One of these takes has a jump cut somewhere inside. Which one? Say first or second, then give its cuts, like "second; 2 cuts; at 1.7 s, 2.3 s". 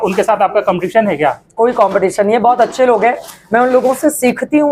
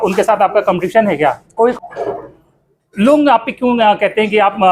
second; 1 cut; at 1.7 s